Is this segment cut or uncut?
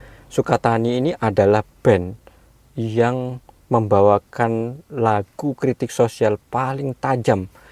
uncut